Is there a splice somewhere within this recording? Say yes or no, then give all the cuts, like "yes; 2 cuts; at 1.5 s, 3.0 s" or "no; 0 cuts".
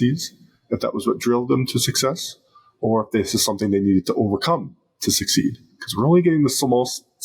no; 0 cuts